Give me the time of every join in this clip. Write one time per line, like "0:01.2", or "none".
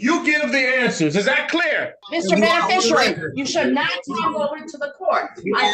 0:02.0